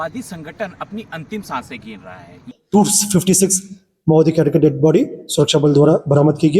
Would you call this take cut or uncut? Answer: cut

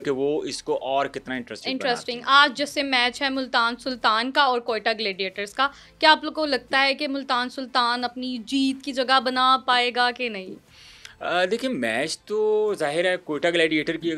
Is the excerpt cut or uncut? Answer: uncut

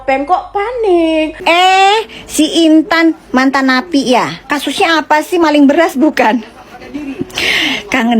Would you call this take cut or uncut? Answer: cut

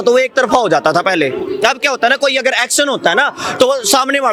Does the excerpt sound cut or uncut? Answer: uncut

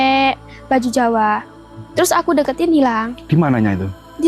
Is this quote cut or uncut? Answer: uncut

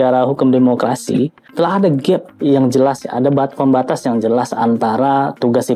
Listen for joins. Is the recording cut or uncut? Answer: cut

